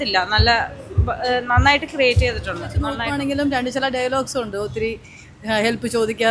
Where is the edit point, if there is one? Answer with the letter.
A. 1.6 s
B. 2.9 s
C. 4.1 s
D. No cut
B